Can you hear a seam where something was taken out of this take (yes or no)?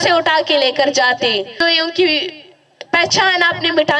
yes